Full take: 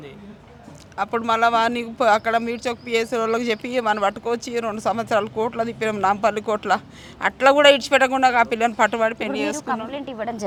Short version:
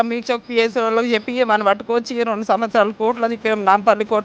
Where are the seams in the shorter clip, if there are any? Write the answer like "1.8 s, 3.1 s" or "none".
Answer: none

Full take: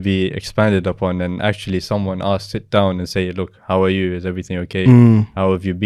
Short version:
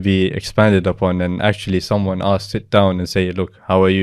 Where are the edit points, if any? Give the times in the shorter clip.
none

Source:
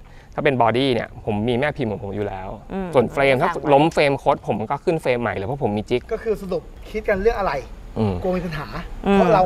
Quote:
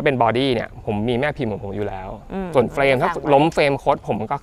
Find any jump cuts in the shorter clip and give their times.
none

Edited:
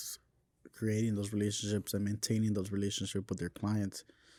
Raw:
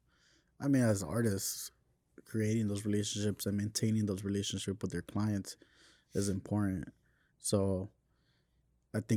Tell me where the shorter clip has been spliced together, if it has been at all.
none

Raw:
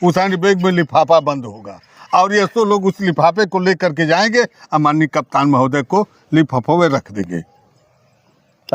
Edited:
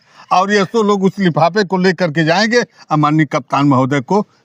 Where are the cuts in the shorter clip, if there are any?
none

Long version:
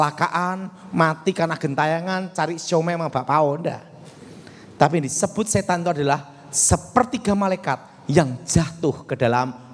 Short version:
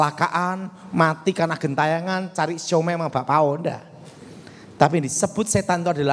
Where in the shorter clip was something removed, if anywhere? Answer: none

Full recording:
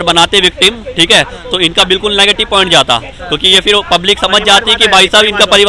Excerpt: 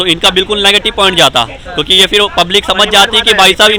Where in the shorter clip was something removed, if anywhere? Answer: none

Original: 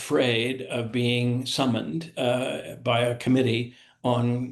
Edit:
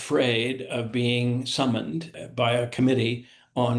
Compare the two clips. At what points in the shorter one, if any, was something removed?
2.1 s

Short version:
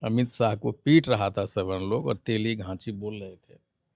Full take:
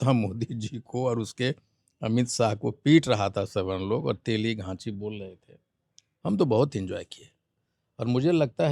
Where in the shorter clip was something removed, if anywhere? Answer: none

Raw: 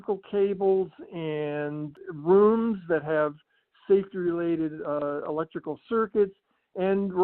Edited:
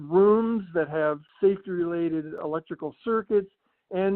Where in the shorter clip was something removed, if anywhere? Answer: 1.3 s, 2.4 s

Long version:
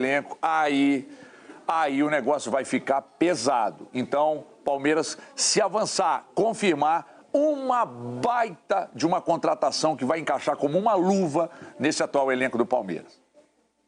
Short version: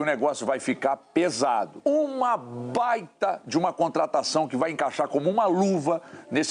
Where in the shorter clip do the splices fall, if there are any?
1.7 s

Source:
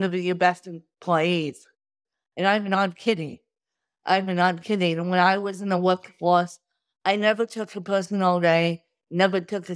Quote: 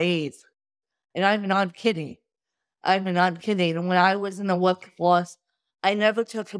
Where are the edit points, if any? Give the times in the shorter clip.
none

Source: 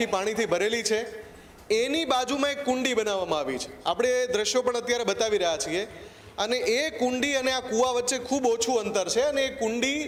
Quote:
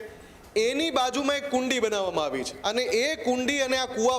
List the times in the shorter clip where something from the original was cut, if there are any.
2.5 s

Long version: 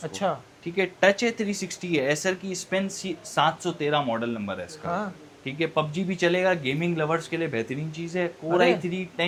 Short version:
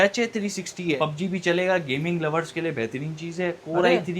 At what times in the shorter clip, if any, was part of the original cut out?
1.0 s

